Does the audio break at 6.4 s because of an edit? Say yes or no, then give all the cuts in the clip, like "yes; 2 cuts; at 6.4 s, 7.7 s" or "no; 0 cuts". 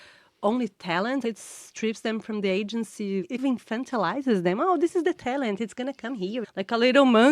yes; 3 cuts; at 1.2 s, 3.4 s, 6.4 s